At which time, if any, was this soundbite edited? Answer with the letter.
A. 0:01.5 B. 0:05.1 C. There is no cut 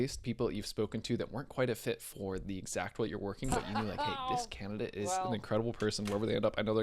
B